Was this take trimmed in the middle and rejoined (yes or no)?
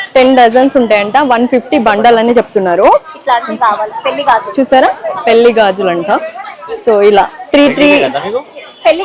no